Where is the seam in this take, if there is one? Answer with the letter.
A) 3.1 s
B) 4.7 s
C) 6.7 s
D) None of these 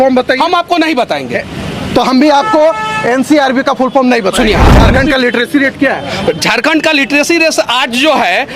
B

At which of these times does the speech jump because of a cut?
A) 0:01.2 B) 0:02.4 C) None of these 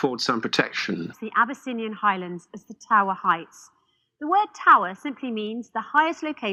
C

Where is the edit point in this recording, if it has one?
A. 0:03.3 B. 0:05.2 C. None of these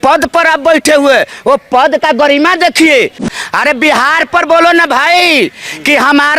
A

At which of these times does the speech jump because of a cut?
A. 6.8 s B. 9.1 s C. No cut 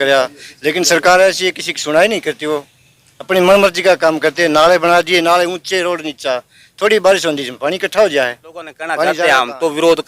B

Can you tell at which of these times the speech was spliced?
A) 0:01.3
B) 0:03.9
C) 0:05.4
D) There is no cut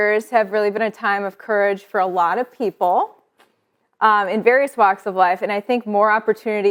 D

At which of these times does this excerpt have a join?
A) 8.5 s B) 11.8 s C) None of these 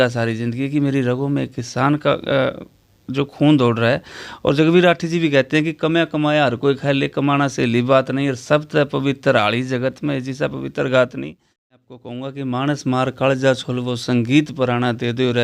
B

